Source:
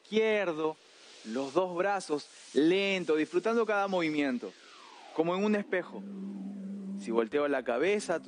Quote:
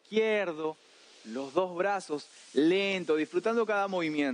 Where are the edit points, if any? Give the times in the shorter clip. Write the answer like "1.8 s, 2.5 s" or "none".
none

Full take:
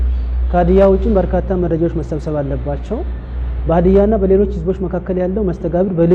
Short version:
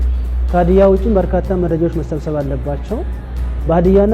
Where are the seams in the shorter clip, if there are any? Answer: none

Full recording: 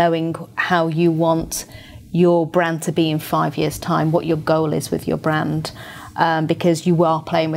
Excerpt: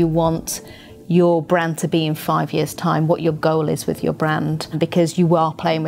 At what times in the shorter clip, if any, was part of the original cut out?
4.7 s

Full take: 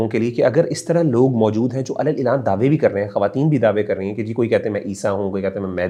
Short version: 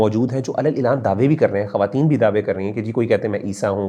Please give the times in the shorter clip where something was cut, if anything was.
none

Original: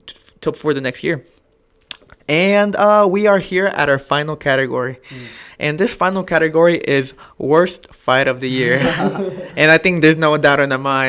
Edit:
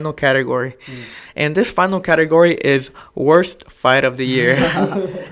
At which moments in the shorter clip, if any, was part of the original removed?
none

